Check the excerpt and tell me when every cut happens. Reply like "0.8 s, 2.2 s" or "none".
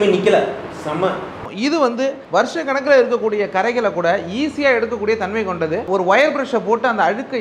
1.5 s, 5.8 s